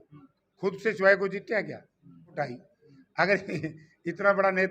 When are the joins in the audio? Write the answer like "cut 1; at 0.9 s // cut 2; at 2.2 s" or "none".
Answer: cut 1; at 2.3 s